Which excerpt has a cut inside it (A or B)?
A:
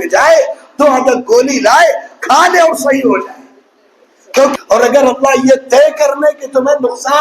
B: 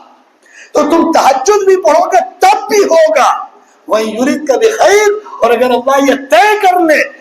A